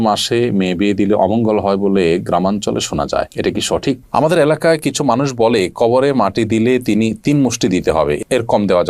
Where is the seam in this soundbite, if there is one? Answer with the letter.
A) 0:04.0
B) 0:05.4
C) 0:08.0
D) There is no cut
A